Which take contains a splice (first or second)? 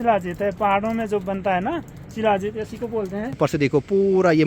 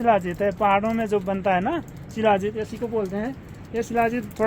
first